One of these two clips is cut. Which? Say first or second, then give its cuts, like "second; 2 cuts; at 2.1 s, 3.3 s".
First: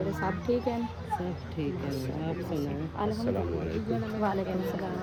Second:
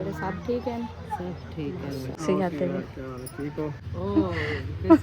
second; 2 cuts; at 2.2 s, 3.9 s